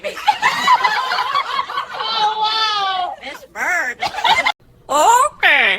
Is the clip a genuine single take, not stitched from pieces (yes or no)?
no